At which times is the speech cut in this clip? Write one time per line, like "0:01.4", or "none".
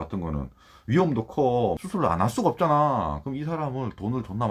0:01.8